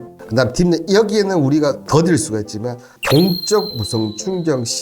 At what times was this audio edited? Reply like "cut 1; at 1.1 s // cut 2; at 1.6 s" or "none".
cut 1; at 2.9 s